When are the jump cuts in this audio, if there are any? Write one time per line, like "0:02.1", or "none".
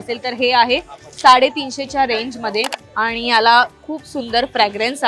0:02.8